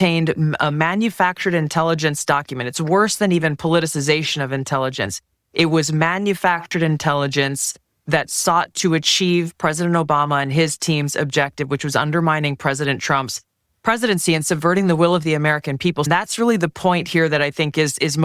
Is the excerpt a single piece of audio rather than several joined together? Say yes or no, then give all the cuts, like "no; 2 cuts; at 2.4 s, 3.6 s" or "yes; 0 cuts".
no; 1 cut; at 16.1 s